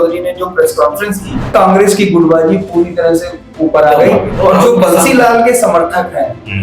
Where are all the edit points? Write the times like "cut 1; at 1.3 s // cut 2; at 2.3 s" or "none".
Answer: cut 1; at 1.5 s

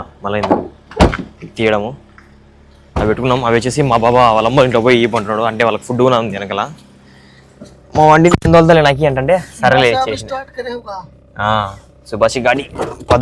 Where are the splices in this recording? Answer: none

